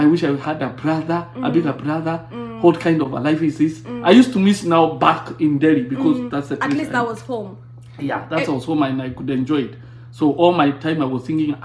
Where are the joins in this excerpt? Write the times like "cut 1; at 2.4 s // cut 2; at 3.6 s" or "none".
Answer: none